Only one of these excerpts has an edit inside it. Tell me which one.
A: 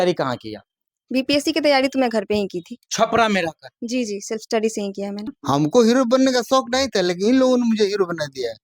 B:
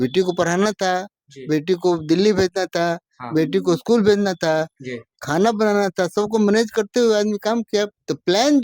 A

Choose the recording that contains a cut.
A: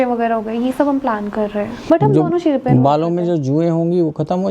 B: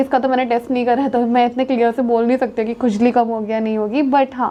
A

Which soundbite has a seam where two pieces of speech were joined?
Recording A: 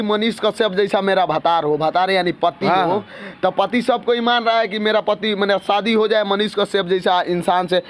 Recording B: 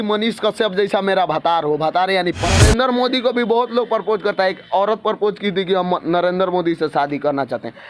B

